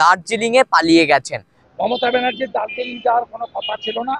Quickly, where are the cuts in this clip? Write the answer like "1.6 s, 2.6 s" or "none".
1.5 s